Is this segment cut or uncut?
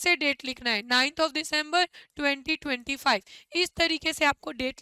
uncut